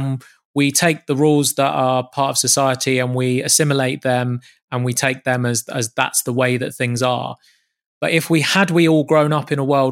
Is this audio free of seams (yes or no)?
yes